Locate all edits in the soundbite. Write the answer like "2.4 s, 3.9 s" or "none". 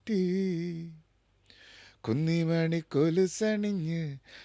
none